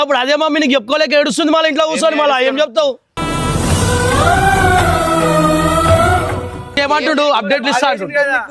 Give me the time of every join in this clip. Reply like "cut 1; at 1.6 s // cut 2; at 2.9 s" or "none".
cut 1; at 6.7 s

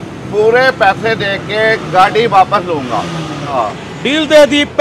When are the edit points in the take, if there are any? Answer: cut 1; at 3.5 s

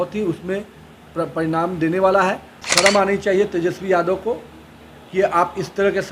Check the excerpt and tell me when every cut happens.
cut 1; at 2.5 s

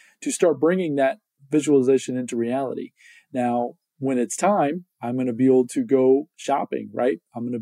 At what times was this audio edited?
cut 1; at 1.3 s

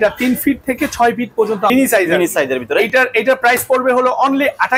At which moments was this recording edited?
cut 1; at 1.7 s

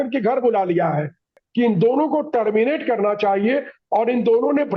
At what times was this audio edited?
cut 1; at 1.4 s

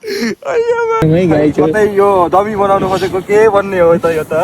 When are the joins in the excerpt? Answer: cut 1; at 1.0 s

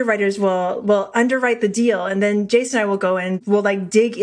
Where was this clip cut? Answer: cut 1; at 3.3 s

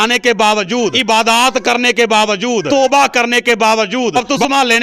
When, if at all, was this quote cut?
cut 1; at 1.0 s // cut 2; at 2.7 s // cut 3; at 4.1 s

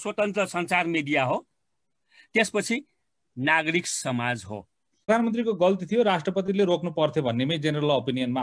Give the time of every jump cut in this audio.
cut 1; at 5.1 s

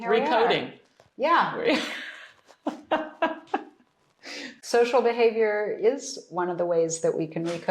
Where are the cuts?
cut 1; at 4.6 s

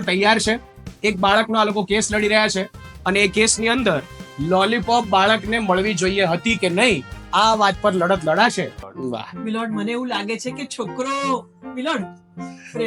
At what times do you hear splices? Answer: cut 1; at 8.8 s

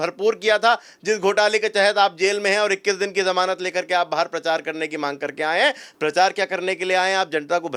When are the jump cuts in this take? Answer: none

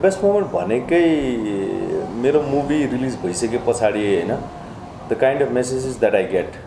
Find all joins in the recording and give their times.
none

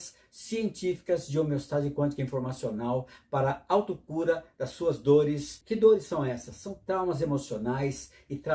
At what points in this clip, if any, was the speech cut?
cut 1; at 5.5 s

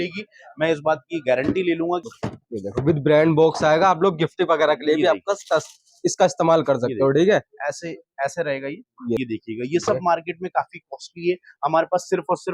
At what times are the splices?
cut 1; at 2.1 s // cut 2; at 9.2 s

